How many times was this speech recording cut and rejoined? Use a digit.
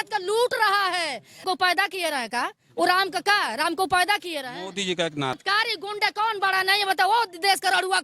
2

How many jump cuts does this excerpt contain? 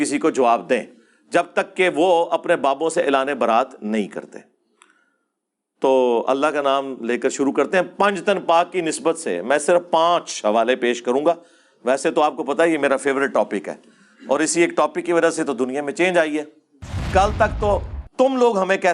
1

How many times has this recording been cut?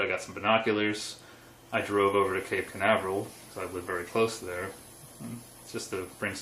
1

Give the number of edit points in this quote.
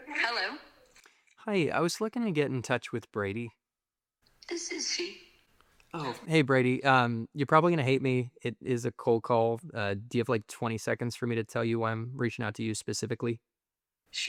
0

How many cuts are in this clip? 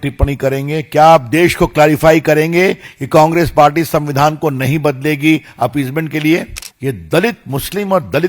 1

